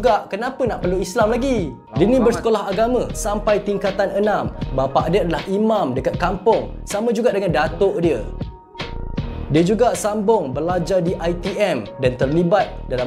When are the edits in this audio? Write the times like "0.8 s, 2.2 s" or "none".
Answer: 1.8 s